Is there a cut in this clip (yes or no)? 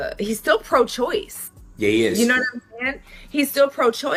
no